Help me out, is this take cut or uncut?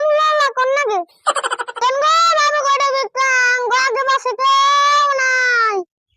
cut